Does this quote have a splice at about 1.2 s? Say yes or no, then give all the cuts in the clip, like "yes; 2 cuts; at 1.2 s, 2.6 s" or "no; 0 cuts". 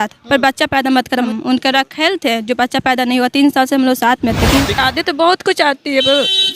yes; 2 cuts; at 1.2 s, 4.8 s